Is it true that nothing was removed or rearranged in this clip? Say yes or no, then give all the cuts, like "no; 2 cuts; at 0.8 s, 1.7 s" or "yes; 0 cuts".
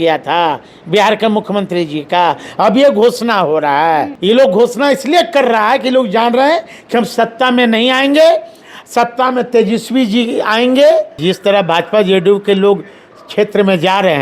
no; 2 cuts; at 4.1 s, 11.2 s